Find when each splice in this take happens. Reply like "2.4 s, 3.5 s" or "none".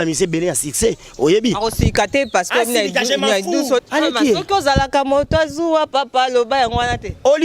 3.8 s

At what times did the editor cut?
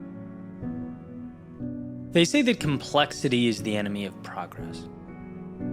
1.0 s

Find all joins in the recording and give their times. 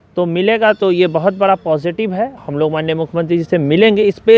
2.4 s

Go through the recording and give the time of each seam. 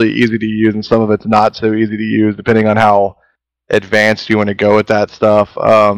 none

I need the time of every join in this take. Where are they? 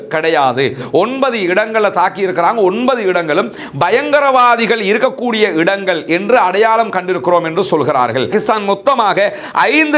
8.3 s

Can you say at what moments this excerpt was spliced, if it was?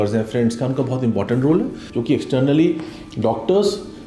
1.9 s

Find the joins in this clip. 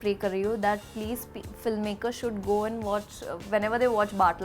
none

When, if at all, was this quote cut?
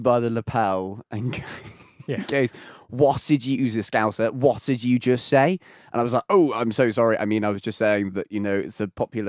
none

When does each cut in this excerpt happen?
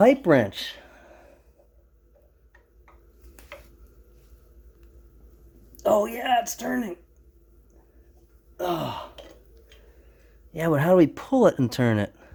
none

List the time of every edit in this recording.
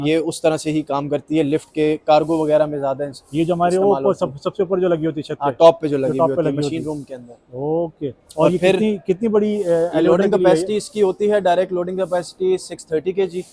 none

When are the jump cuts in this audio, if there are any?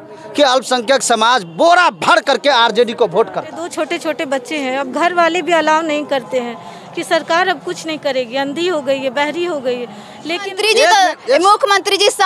3.6 s, 10.5 s

